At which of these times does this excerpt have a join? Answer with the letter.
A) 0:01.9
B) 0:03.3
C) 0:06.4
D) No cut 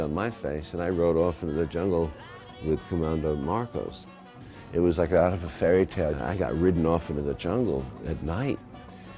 A